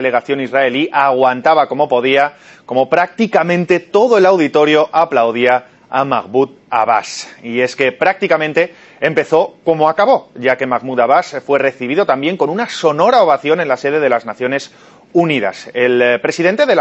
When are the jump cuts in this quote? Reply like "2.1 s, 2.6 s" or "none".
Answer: 13.0 s